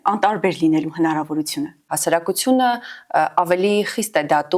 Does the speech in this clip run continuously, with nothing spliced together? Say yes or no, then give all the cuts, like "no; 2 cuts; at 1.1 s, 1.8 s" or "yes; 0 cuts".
no; 1 cut; at 1.9 s